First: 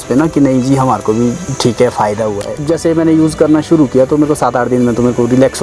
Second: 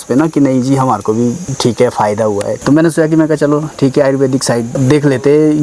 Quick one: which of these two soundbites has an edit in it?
first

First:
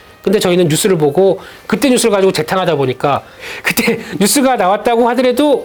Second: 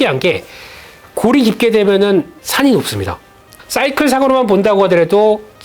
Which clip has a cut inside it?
second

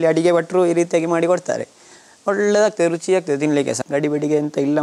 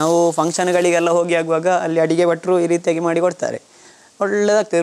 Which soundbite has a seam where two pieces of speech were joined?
first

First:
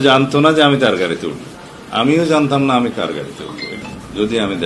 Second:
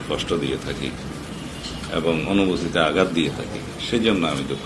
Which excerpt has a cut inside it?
first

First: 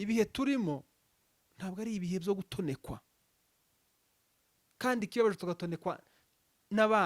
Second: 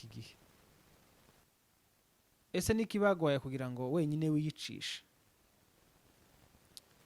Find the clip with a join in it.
second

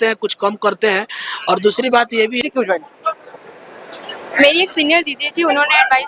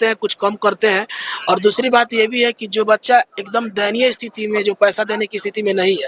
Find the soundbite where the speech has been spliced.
first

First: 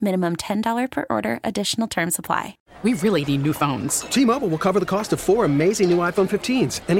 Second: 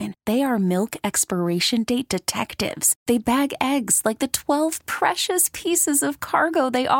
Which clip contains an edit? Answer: first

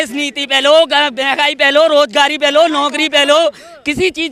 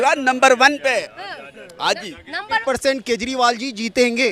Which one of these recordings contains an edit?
second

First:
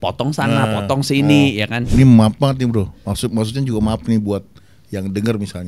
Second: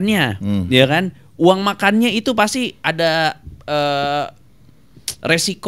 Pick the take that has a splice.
first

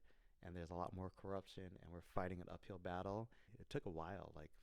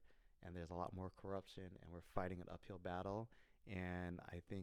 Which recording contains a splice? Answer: first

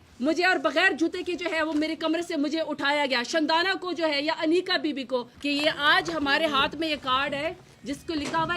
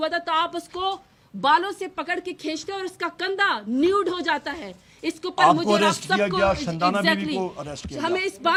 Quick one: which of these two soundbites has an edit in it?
first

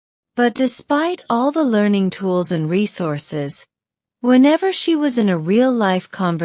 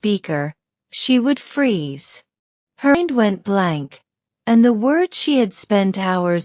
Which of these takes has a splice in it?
second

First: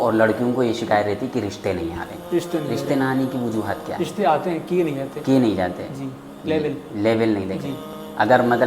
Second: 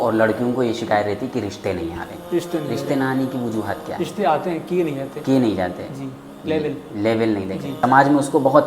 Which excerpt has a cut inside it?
second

